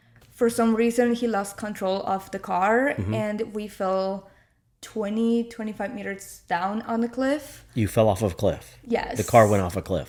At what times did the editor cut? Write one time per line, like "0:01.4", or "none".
none